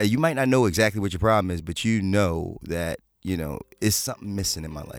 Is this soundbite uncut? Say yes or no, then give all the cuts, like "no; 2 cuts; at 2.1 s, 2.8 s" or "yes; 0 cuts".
yes; 0 cuts